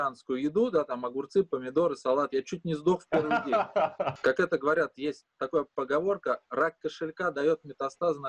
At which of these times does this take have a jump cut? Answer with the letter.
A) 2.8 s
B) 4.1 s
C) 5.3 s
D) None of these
B